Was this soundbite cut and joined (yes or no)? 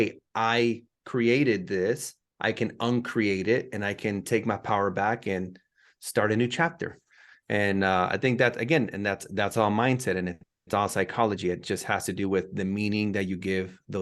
no